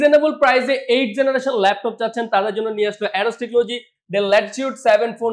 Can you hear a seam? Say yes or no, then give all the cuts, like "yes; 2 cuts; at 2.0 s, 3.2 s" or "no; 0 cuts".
no; 0 cuts